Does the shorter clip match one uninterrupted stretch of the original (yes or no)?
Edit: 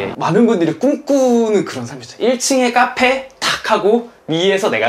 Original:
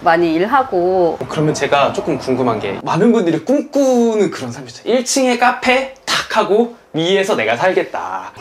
yes